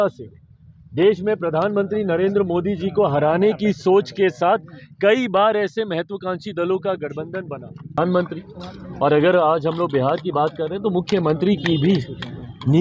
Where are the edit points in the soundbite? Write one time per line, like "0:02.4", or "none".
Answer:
0:08.0